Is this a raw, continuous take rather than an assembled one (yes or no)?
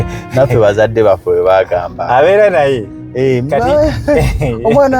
yes